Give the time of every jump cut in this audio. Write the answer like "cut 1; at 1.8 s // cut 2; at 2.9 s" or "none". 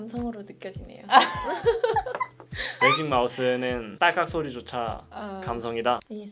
none